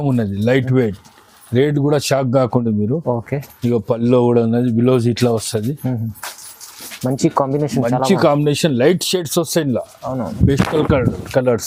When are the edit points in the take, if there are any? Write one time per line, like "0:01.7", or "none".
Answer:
none